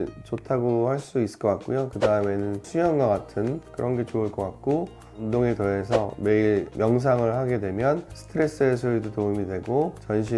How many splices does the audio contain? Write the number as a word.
zero